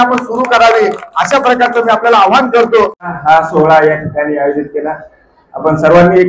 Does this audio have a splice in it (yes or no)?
yes